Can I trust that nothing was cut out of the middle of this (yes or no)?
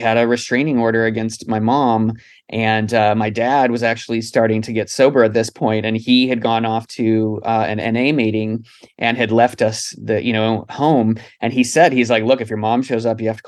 yes